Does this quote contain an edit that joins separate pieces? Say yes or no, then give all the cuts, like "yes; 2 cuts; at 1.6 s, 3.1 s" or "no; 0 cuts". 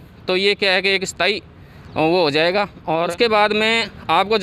yes; 1 cut; at 3.1 s